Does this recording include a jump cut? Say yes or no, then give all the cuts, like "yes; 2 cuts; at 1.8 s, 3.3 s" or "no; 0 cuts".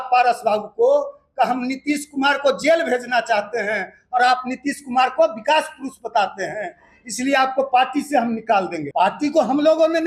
yes; 1 cut; at 8.8 s